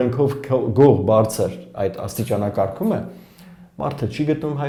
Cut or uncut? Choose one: uncut